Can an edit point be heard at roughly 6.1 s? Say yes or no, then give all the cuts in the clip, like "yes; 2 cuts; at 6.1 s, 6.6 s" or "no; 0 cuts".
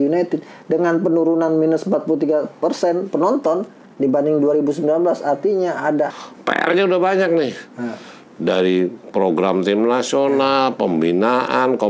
yes; 1 cut; at 6.1 s